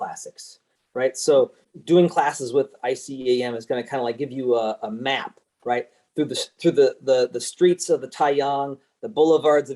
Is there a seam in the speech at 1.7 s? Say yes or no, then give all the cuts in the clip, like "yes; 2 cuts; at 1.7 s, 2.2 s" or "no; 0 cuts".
yes; 1 cut; at 1.7 s